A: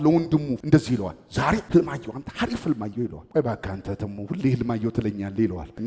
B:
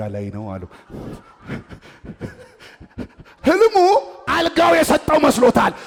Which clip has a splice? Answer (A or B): A